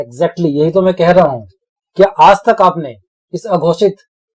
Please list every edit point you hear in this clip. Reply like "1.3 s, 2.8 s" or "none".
none